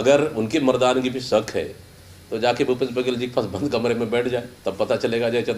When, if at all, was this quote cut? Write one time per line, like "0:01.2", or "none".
0:04.6